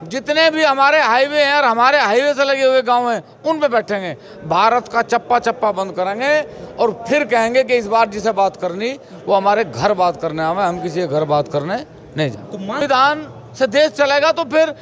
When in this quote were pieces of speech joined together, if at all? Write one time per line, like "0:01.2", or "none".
0:12.8